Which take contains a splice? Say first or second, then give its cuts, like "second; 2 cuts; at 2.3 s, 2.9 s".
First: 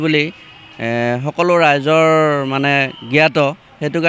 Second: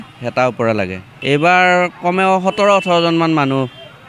second; 1 cut; at 1.0 s